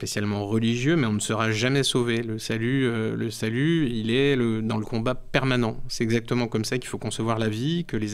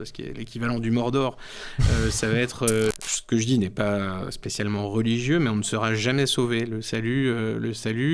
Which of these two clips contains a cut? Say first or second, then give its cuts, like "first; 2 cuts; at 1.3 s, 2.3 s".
second; 1 cut; at 2.9 s